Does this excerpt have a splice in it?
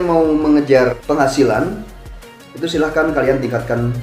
yes; 1 cut; at 0.9 s

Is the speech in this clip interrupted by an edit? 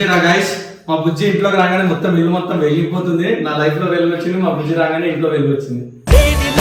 no; 0 cuts

